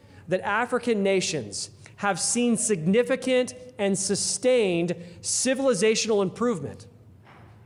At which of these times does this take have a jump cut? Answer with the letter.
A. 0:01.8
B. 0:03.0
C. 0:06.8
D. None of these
D